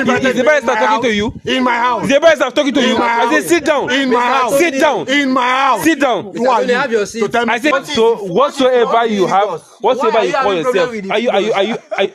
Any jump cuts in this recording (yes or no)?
yes